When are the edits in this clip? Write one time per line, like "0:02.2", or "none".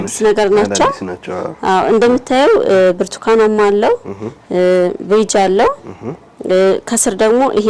none